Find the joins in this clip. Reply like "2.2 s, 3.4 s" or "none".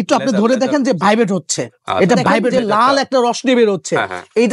2.5 s